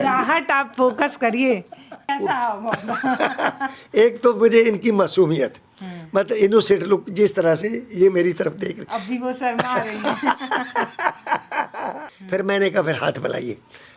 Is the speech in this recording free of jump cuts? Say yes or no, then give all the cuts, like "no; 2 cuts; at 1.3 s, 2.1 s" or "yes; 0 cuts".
no; 2 cuts; at 2.0 s, 12.1 s